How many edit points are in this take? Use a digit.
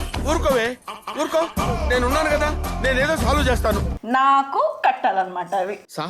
1